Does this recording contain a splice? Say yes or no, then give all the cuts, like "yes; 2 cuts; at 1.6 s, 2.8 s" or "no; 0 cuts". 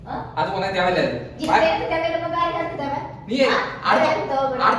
no; 0 cuts